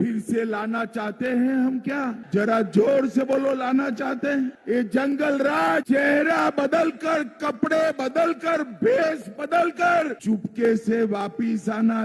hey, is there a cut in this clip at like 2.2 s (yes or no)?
yes